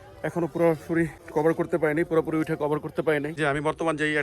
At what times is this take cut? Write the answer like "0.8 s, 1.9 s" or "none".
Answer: 1.2 s, 3.4 s

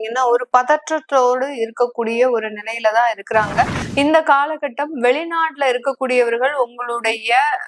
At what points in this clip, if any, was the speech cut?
3.8 s

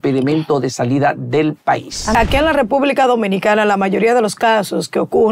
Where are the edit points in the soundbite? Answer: 2.1 s

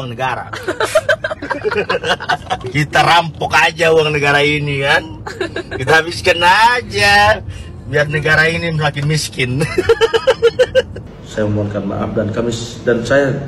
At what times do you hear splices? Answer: 2.6 s, 10.9 s

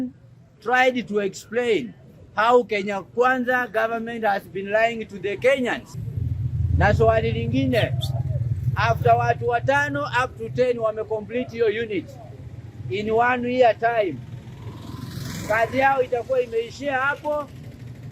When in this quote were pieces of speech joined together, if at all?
6.0 s

